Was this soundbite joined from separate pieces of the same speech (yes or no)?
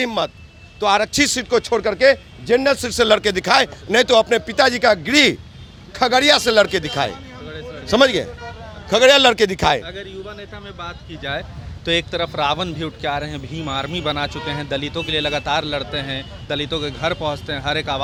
no